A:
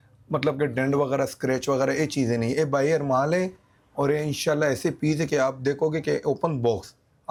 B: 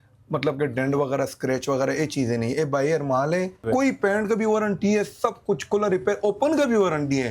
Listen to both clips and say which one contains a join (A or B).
B